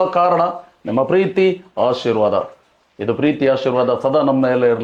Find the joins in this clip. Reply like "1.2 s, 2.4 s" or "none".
none